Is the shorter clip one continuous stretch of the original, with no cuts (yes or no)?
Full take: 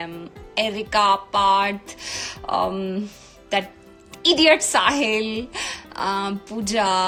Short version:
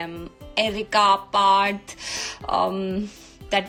yes